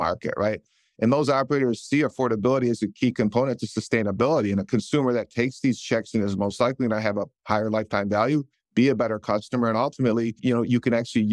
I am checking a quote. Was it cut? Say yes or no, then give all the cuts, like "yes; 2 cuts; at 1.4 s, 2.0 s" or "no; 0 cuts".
yes; 2 cuts; at 8.6 s, 10.4 s